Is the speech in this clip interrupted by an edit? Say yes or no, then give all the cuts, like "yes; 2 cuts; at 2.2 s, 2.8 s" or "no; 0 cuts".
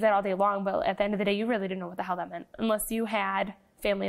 no; 0 cuts